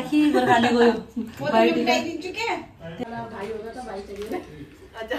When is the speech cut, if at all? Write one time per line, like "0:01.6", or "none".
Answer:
0:03.1